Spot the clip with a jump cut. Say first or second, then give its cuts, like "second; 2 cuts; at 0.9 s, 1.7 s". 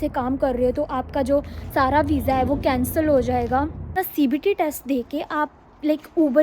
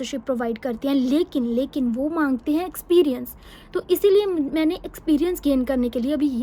first; 1 cut; at 4.0 s